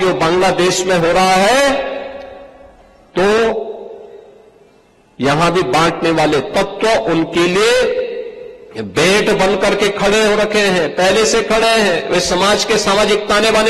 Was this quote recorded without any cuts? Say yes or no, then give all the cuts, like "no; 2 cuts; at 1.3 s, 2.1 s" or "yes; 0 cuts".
yes; 0 cuts